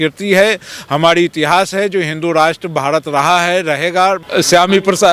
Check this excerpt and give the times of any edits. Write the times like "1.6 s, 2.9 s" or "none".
4.2 s